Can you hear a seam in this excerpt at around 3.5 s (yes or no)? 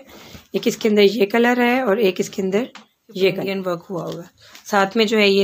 yes